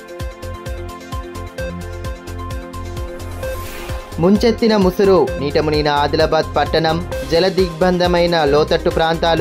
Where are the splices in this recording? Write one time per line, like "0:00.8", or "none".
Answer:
0:01.0
0:04.0